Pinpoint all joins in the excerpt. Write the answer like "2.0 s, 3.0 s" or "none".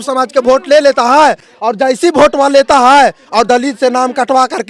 none